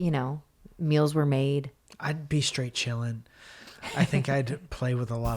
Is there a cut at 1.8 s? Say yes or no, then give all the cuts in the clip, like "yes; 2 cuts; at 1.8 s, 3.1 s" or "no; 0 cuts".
yes; 1 cut; at 1.8 s